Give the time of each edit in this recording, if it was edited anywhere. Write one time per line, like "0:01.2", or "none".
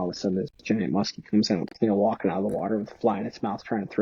none